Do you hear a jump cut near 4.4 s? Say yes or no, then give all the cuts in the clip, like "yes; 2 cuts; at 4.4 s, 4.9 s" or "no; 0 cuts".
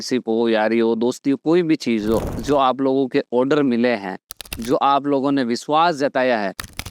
no; 1 cut; at 2.3 s